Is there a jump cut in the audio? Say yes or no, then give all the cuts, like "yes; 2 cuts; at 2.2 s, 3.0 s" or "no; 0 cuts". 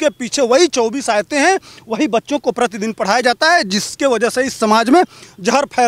no; 0 cuts